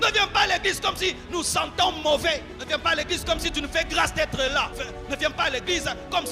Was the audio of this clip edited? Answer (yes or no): yes